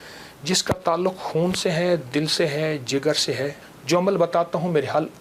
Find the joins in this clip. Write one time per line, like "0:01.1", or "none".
0:03.7